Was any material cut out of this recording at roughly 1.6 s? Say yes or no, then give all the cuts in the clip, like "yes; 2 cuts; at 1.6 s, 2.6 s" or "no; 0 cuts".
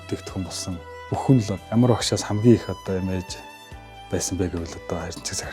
yes; 2 cuts; at 0.9 s, 1.6 s